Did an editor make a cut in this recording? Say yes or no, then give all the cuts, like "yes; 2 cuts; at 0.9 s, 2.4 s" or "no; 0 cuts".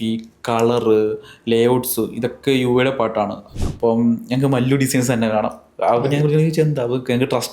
yes; 1 cut; at 3.5 s